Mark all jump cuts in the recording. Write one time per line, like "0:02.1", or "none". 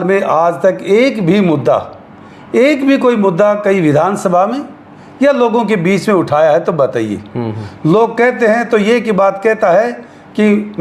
none